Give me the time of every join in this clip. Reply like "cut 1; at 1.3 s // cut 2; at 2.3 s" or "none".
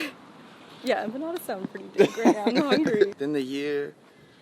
cut 1; at 3.2 s